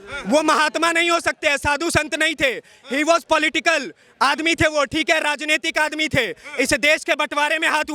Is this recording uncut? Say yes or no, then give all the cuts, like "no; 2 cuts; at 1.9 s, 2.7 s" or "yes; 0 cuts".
yes; 0 cuts